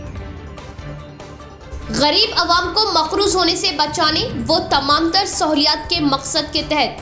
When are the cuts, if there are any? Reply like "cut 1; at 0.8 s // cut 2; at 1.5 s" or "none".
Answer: cut 1; at 1.2 s